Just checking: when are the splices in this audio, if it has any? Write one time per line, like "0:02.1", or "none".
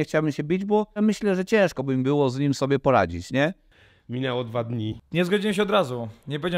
0:01.0
0:03.9
0:05.0

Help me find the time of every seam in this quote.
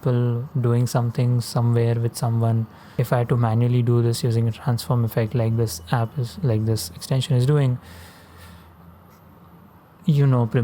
0:02.8

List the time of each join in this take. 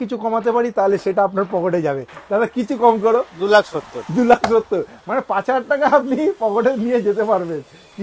none

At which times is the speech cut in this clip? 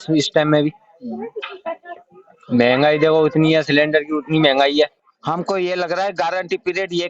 0:05.0

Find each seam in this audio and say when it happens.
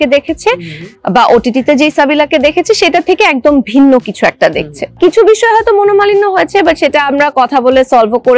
0:05.0

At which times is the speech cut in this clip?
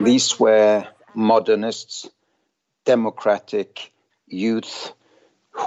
0:01.0

